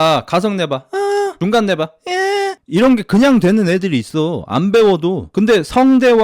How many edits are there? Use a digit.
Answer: 1